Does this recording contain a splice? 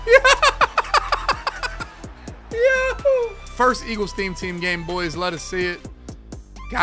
yes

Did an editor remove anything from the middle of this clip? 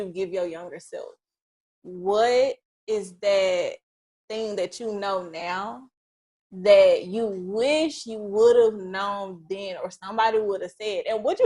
no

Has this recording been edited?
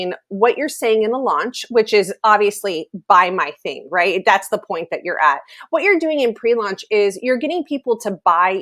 no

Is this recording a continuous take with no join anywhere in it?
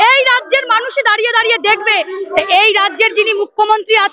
no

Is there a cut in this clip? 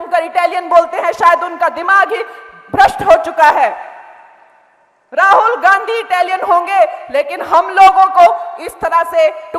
no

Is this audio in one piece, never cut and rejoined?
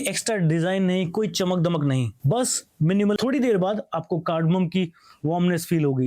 no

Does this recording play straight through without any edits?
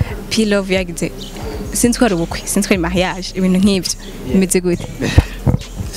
yes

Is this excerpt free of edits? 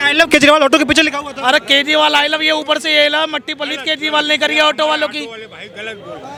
yes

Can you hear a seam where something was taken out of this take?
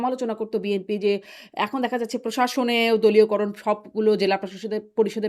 no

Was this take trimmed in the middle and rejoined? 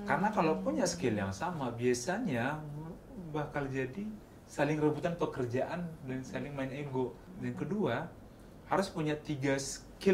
yes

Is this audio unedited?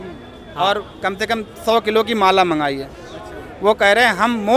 yes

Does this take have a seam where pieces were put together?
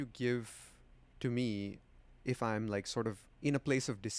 yes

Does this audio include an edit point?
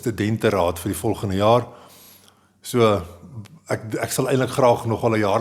no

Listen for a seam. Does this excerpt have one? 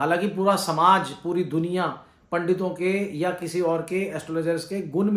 no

